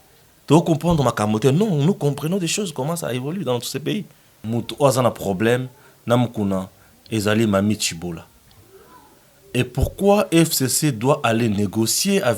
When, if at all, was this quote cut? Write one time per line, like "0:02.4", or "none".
0:04.3